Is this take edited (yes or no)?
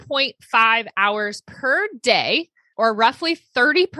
yes